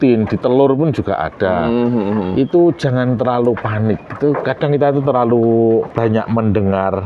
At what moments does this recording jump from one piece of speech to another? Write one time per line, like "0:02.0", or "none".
0:05.9